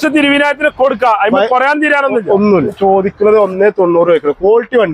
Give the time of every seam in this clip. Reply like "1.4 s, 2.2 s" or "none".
2.8 s